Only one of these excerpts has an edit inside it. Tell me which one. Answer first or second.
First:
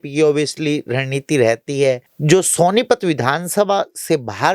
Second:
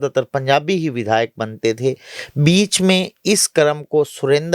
first